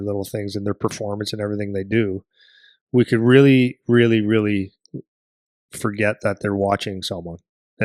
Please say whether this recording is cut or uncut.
uncut